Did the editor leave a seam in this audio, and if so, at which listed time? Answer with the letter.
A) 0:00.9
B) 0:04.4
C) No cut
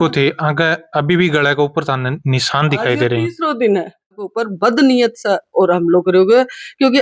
B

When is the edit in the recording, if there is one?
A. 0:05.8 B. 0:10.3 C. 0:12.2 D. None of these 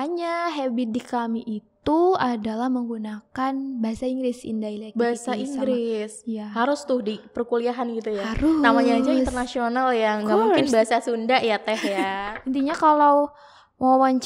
C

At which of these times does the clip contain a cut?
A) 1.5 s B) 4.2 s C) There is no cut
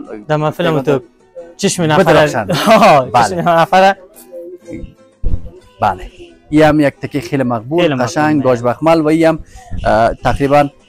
C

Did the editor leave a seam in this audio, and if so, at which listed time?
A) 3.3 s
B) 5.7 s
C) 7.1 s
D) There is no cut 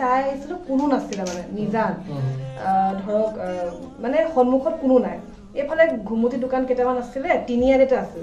D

